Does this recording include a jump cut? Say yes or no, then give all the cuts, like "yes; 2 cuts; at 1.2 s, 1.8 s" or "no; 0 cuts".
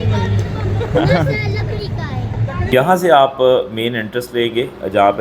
yes; 1 cut; at 2.7 s